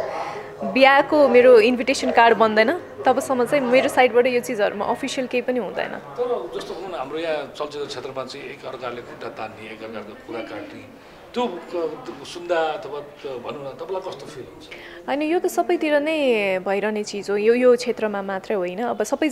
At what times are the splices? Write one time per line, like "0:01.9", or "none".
none